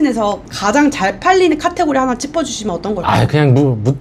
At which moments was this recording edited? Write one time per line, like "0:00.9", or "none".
none